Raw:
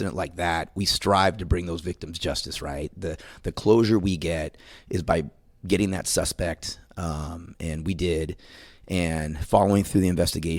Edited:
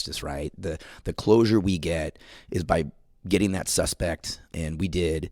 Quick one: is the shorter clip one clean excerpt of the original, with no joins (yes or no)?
no